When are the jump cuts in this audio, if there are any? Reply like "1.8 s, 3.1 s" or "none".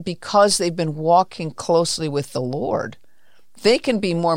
none